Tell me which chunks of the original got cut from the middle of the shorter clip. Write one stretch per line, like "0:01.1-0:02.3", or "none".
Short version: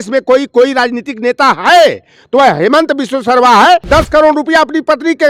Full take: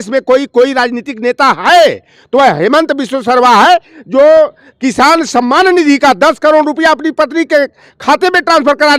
0:03.9-0:06.2